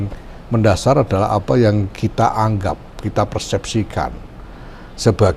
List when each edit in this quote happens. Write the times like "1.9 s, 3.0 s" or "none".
none